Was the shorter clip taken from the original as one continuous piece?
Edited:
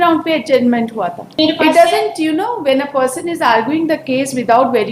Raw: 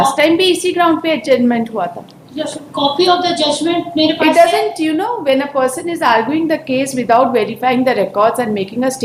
no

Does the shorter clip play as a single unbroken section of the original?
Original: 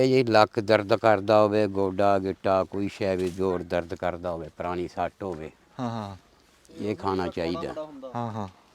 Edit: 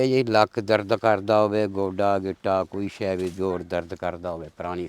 yes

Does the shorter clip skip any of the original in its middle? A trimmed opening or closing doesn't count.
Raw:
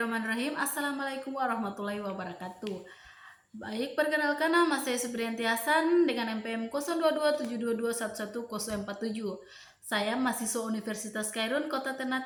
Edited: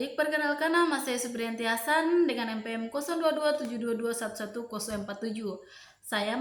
no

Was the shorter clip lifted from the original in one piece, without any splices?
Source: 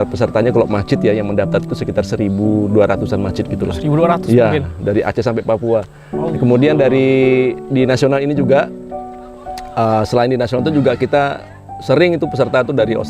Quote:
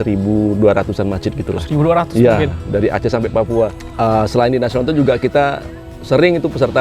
no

